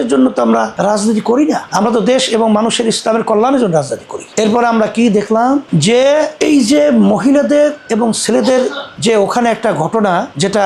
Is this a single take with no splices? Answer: yes; 0 cuts

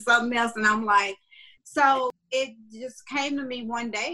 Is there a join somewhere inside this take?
yes; 1 cut; at 2.2 s

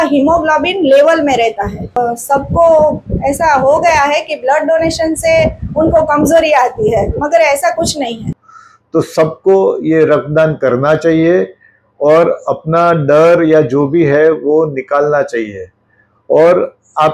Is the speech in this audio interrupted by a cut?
yes; 2 cuts; at 2.0 s, 8.4 s

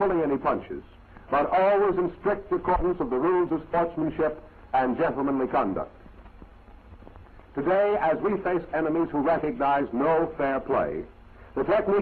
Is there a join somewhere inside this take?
yes; 1 cut; at 4.8 s

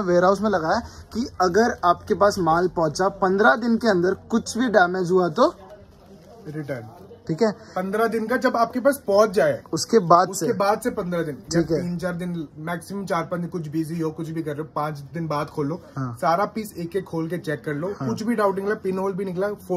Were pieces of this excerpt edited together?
no; 0 cuts

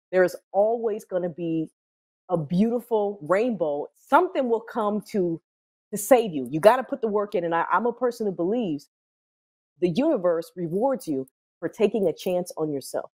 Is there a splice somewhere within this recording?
no; 0 cuts

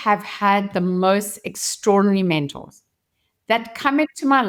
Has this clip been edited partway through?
no; 0 cuts

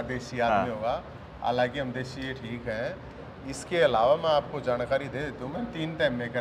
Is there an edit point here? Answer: no; 0 cuts

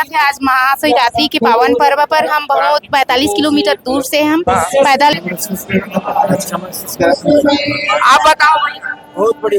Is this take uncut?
no; 1 cut; at 5.1 s

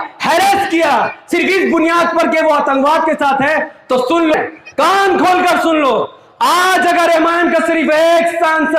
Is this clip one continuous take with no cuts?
no; 1 cut; at 4.3 s

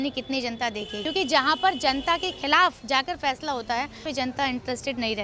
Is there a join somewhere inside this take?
yes; 2 cuts; at 1.0 s, 4.0 s

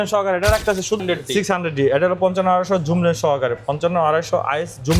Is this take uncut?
no; 1 cut; at 1.0 s

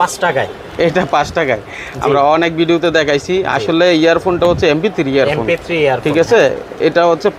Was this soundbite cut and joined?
no; 0 cuts

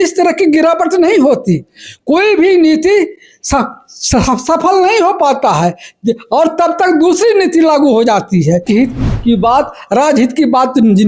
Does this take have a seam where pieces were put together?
yes; 1 cut; at 8.6 s

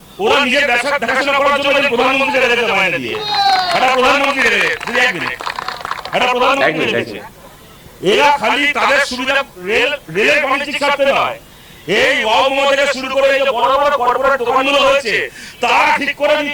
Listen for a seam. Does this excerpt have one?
no; 0 cuts

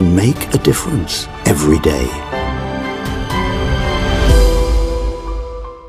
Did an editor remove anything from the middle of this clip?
no; 0 cuts

